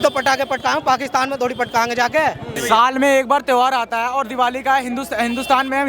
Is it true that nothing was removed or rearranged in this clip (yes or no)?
no